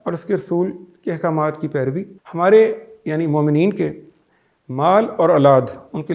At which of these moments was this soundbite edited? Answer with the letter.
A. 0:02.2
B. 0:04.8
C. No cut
A